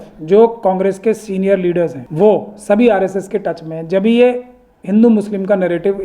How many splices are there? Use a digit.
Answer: 1